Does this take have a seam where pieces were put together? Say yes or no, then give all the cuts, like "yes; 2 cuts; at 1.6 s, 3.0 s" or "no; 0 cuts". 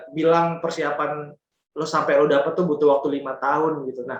no; 0 cuts